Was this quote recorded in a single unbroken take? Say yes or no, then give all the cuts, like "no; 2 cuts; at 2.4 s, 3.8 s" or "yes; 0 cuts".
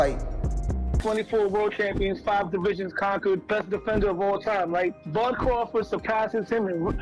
no; 1 cut; at 0.9 s